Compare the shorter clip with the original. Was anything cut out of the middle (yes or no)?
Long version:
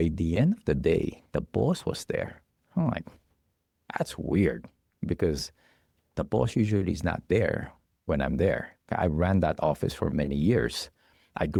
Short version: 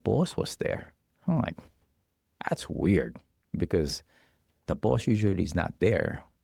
no